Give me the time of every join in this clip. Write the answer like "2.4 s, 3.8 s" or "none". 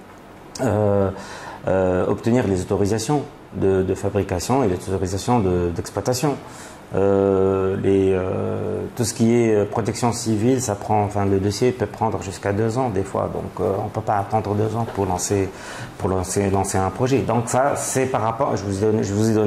none